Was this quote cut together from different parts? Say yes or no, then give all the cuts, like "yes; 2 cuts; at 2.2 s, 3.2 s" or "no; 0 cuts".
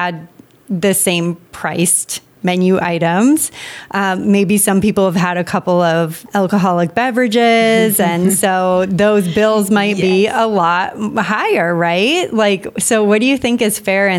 yes; 1 cut; at 6.2 s